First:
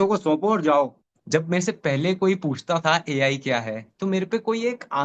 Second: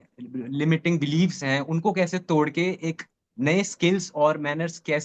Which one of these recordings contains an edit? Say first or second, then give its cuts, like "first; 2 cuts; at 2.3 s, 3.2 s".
first; 1 cut; at 1.1 s